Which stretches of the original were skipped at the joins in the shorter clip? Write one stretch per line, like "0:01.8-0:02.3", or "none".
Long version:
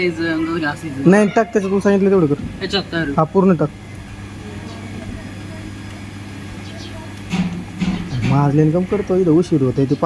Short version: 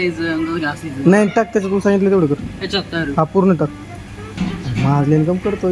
0:04.4-0:07.8